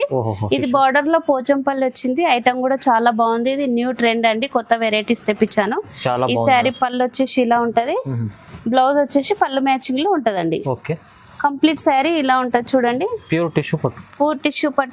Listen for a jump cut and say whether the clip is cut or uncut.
uncut